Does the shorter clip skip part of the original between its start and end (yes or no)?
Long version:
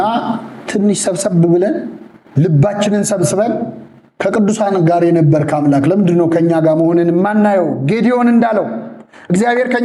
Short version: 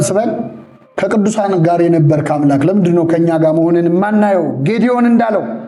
no